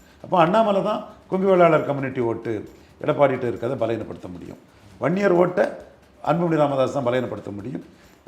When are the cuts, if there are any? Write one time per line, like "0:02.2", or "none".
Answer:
0:05.9